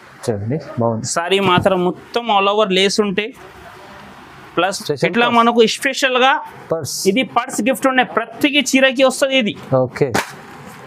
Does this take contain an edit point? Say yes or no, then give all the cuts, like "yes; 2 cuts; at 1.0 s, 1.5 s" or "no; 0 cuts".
yes; 1 cut; at 4.7 s